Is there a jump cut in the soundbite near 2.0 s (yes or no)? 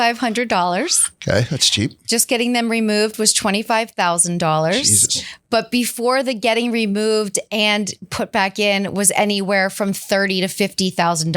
yes